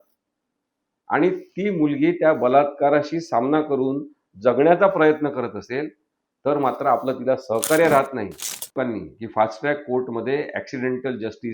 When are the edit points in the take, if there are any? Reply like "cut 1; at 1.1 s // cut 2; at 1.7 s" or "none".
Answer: cut 1; at 8.7 s